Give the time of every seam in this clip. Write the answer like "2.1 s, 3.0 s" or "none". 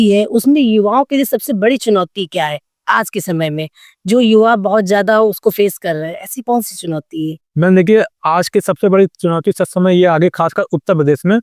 none